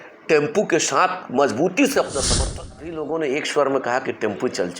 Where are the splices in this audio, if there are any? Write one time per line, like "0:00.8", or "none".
0:02.3